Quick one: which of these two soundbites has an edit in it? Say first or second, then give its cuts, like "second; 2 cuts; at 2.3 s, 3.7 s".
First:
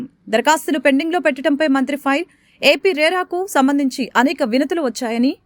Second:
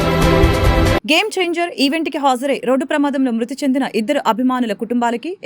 second; 1 cut; at 1.0 s